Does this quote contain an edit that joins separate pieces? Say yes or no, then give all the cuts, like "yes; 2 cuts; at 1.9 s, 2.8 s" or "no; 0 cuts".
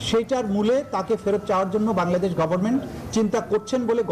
no; 0 cuts